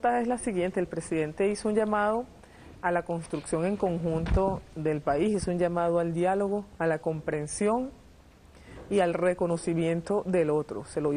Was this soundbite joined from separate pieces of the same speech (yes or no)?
no